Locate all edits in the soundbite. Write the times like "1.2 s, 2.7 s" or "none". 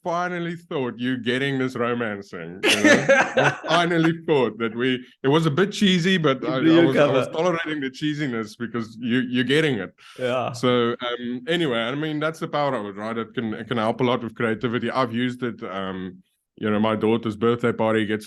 none